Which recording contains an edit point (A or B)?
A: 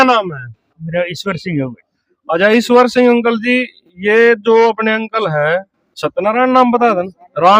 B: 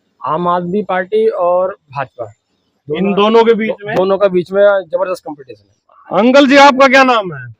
B